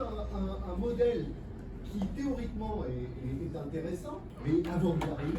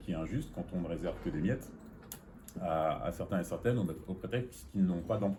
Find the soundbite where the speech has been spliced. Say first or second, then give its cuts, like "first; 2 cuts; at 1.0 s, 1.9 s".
first; 1 cut; at 4.3 s